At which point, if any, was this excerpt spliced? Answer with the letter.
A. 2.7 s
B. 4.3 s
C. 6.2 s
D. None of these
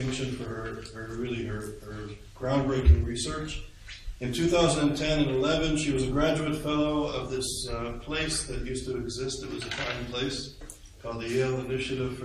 A